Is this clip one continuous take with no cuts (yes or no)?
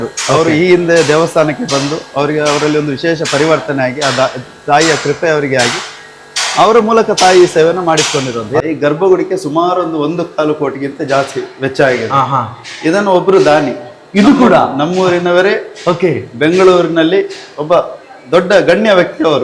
no